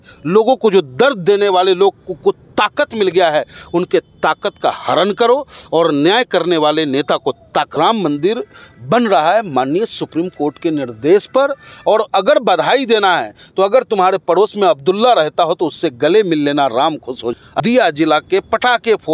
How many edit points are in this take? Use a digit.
2